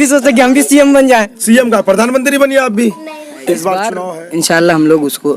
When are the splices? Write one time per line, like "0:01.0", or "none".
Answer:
0:04.0